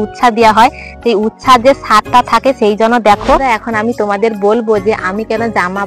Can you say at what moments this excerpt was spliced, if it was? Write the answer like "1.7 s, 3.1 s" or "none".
3.4 s